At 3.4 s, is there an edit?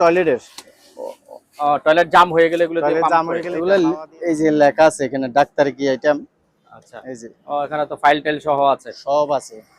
yes; 2 cuts; at 3.4 s, 7.2 s

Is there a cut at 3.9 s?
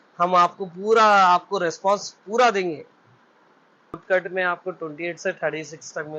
yes; 1 cut; at 3.9 s

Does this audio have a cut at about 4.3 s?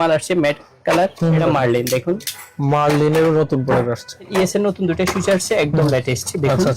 yes; 2 cuts; at 1.4 s, 4.3 s

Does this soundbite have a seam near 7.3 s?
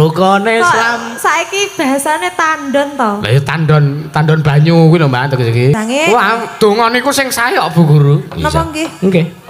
no; 1 cut; at 5.8 s

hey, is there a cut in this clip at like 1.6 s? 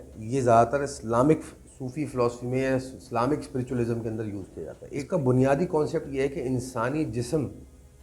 no; 1 cut; at 4.8 s

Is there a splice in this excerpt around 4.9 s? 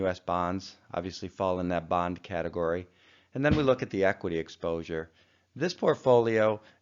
yes; 1 cut; at 4.9 s

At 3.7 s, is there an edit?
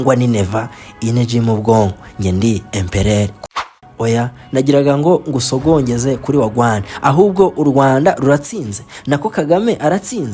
yes; 1 cut; at 3.7 s

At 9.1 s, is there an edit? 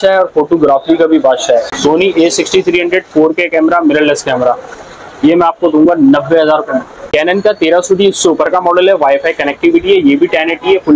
no; 2 cuts; at 1.7 s, 6.9 s

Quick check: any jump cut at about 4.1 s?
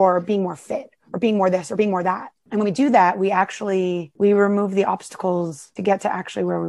yes; 3 cuts; at 2.3 s, 4.1 s, 5.6 s

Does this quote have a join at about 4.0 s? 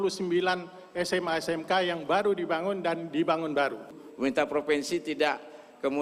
yes; 1 cut; at 4.0 s

